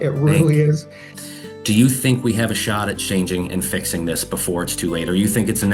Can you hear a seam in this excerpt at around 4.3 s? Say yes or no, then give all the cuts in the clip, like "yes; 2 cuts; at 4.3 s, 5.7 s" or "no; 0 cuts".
no; 1 cut; at 1.1 s